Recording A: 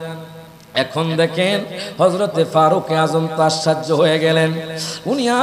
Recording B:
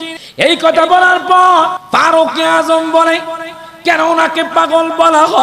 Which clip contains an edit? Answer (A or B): B